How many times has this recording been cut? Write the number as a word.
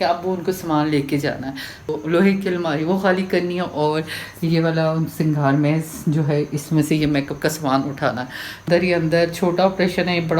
two